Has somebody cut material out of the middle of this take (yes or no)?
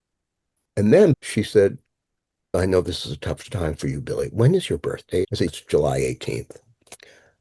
yes